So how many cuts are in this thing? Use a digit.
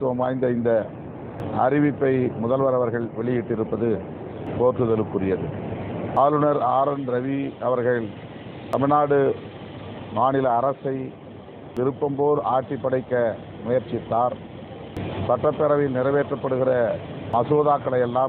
7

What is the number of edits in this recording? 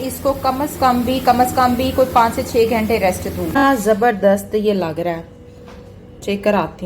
1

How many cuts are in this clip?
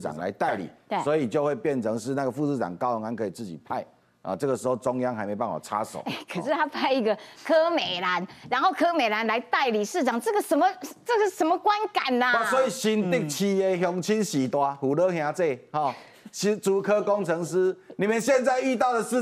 0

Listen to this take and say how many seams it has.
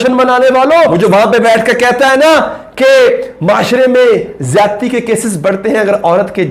1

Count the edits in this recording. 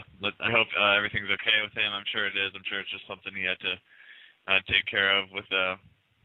0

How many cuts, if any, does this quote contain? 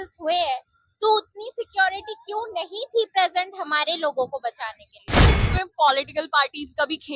1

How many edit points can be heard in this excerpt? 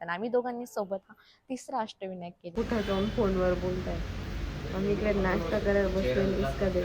1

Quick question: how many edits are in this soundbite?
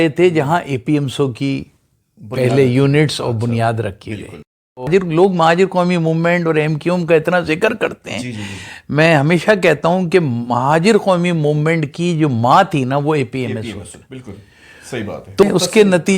2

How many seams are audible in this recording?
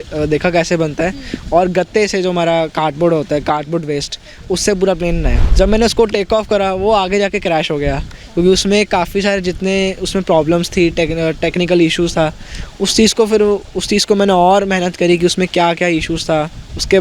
1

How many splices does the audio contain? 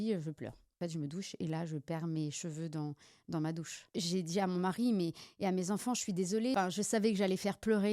3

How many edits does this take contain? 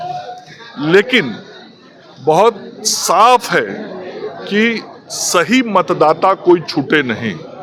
0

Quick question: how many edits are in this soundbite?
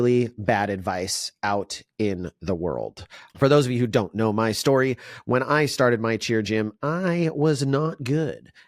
1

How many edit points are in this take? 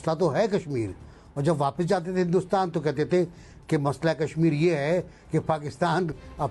0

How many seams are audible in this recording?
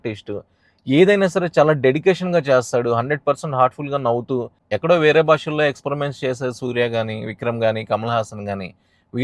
1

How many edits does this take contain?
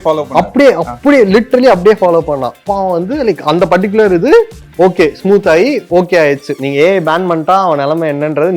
1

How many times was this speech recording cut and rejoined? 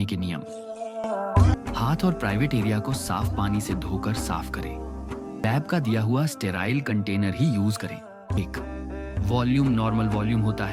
3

